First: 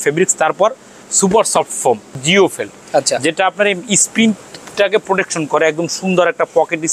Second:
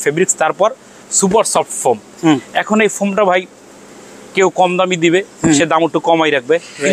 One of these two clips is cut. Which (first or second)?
first